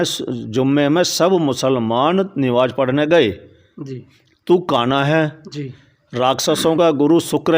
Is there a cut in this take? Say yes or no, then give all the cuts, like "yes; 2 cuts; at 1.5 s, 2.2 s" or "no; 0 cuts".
no; 0 cuts